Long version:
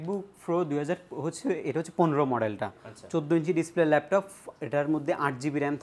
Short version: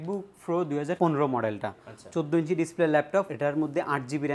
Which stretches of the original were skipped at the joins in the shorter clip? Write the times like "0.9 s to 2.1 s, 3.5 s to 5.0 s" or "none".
1.0 s to 1.9 s, 4.3 s to 4.6 s